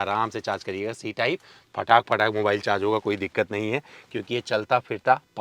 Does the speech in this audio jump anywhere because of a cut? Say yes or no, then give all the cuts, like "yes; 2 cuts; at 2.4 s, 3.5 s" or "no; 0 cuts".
no; 0 cuts